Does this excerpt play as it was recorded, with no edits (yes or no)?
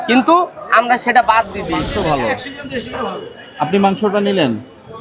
no